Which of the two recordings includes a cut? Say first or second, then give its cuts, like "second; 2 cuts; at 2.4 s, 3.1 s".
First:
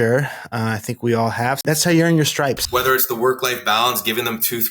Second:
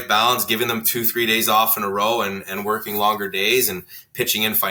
first; 2 cuts; at 1.6 s, 2.6 s